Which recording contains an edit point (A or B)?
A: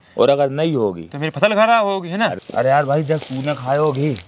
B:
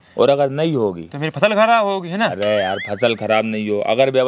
A